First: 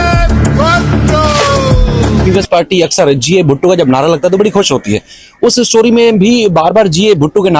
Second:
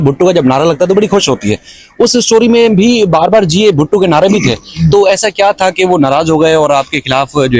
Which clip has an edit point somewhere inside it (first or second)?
first